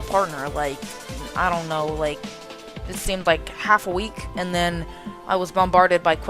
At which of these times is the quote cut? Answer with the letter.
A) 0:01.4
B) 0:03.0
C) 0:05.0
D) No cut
A